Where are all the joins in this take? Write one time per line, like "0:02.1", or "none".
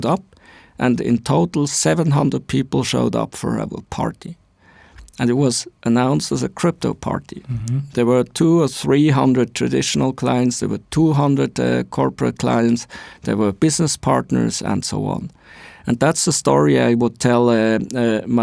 none